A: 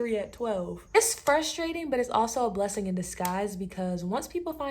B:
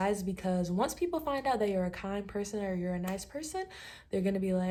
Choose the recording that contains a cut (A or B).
A